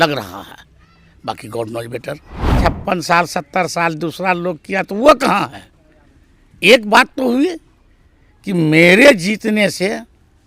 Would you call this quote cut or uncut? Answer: cut